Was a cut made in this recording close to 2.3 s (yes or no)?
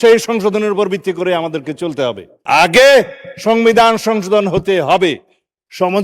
yes